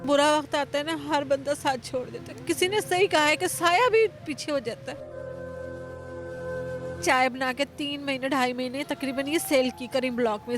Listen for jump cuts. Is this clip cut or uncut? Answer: cut